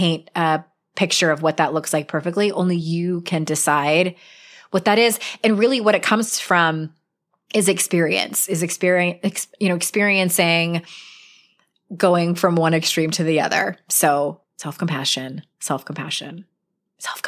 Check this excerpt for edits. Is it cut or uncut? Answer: uncut